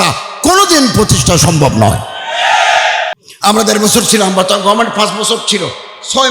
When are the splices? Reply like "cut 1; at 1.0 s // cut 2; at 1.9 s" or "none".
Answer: cut 1; at 3.1 s